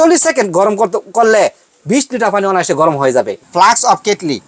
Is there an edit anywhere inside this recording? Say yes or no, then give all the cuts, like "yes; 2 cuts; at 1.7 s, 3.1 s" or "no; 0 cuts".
yes; 1 cut; at 3.4 s